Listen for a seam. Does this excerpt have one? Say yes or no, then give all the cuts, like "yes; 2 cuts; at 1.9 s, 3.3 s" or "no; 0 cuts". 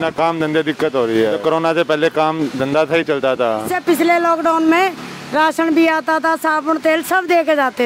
yes; 2 cuts; at 1.4 s, 3.7 s